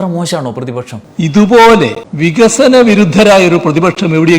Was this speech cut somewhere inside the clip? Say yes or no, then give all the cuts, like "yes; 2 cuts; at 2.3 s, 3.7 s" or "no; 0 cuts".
yes; 1 cut; at 2.0 s